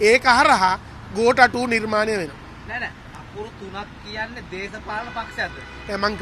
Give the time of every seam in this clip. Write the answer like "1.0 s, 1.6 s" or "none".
none